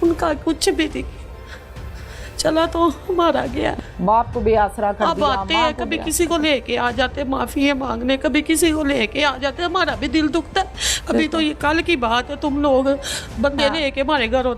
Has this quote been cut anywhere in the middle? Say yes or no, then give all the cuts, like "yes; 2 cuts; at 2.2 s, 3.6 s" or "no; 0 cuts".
yes; 1 cut; at 3.7 s